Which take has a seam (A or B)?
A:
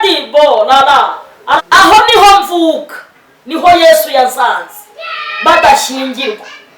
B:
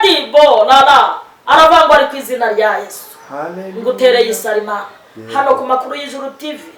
A